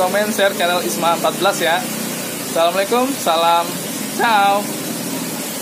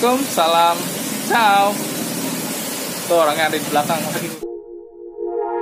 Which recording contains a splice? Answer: second; 1 cut; at 4.3 s

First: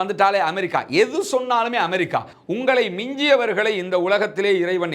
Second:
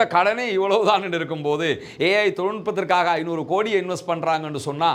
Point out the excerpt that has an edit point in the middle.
first; 1 cut; at 2.4 s

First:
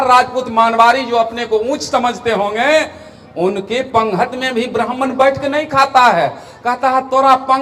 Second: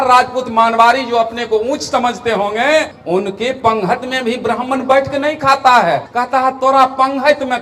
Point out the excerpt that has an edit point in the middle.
second; 2 cuts; at 3.0 s, 6.1 s

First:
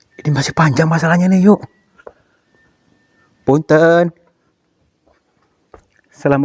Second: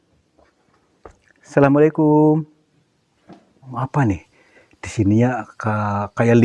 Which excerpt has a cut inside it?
second; 1 cut; at 3.7 s

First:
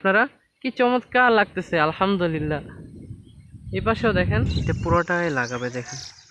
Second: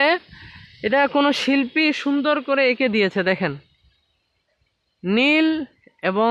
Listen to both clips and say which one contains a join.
first; 1 cut; at 4.7 s

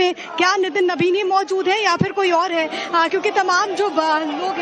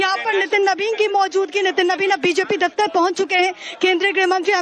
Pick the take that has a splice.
first; 1 cut; at 1.0 s

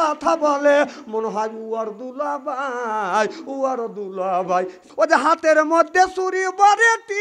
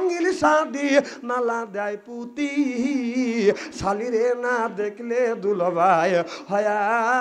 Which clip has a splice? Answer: first; 1 cut; at 4.8 s

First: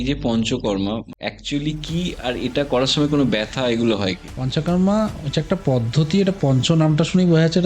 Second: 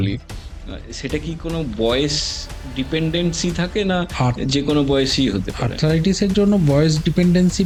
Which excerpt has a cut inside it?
first; 2 cuts; at 1.1 s, 4.3 s

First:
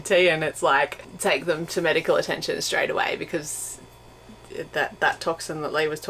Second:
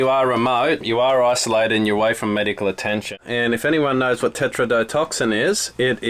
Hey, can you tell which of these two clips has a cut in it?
second; 1 cut; at 3.1 s

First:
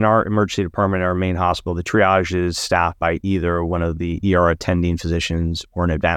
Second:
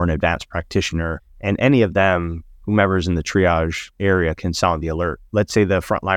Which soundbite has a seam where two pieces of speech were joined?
second; 3 cuts; at 1.3 s, 4.0 s, 5.2 s

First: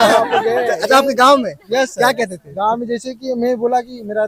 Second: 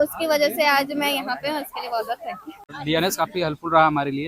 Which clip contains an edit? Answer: second; 1 cut; at 2.7 s

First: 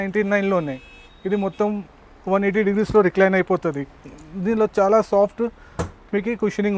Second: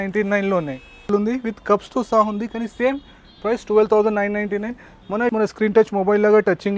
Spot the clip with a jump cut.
second; 2 cuts; at 1.1 s, 5.3 s

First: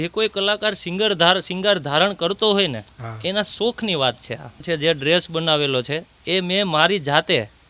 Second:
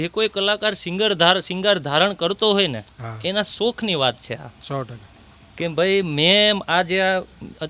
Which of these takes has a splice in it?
first; 1 cut; at 4.6 s

